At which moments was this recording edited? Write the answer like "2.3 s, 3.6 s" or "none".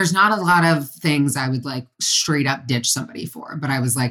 none